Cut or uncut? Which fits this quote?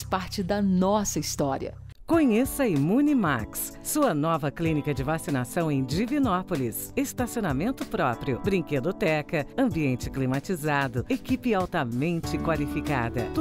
uncut